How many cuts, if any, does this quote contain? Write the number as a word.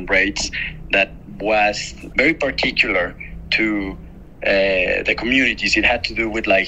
zero